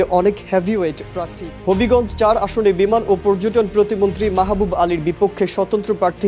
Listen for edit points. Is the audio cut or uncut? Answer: cut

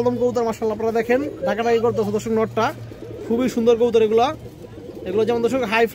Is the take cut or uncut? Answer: uncut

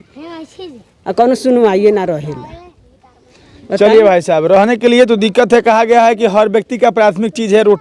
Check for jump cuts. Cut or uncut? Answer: uncut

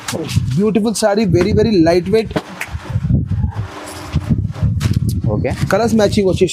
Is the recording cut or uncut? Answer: uncut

